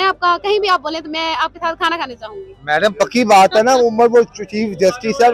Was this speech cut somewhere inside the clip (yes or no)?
no